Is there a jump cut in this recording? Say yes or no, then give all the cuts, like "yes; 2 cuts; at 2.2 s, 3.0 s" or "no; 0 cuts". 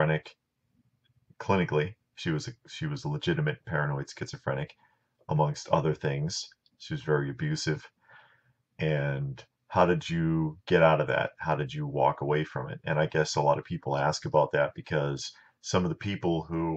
yes; 1 cut; at 5.4 s